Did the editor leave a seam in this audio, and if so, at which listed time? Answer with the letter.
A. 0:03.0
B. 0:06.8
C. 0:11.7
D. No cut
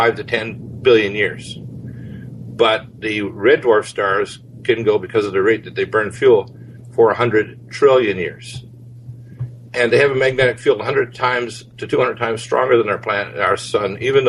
B